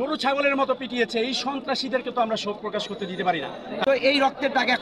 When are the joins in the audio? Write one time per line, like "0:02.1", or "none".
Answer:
0:03.8